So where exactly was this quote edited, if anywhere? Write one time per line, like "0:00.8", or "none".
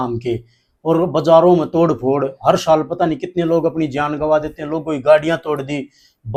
none

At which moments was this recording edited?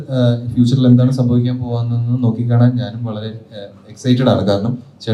none

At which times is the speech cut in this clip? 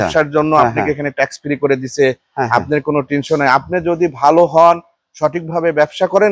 none

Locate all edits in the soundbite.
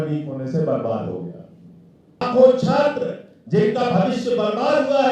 0:02.2

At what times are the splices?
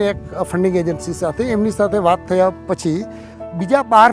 none

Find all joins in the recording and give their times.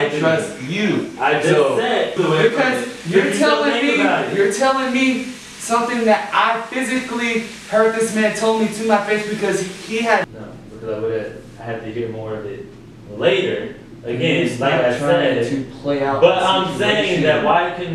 0:02.2
0:10.2

